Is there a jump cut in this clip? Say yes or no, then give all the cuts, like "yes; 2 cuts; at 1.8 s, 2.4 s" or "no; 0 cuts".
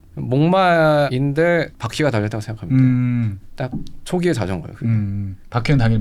no; 0 cuts